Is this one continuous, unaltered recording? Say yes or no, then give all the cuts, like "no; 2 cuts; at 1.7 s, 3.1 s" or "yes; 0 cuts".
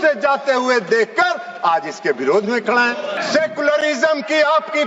no; 1 cut; at 3.2 s